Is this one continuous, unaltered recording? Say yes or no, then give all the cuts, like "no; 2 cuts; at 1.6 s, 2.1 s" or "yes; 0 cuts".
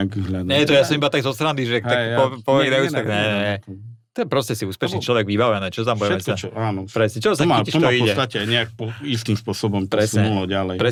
yes; 0 cuts